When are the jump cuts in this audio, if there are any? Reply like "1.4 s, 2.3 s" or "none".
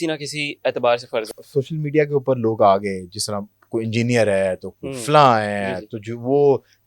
1.3 s